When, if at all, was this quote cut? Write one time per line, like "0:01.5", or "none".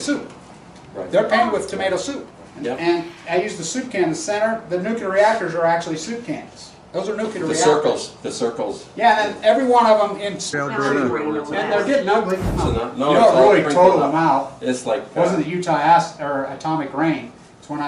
none